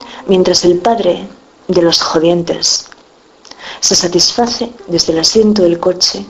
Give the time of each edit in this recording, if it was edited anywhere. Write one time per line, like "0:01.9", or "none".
0:01.8